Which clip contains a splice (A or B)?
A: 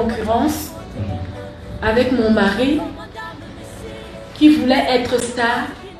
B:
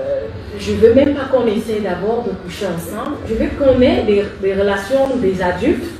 B